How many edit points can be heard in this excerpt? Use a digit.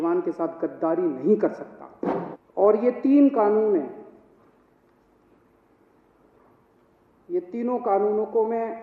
1